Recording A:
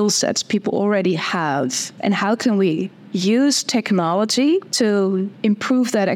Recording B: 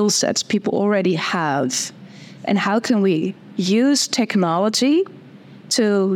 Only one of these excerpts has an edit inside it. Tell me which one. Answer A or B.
A